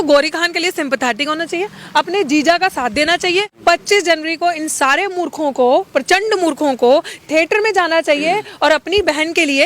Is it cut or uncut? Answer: cut